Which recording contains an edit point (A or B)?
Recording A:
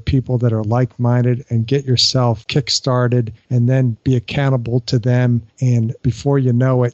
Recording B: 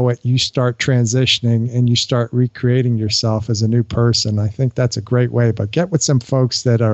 A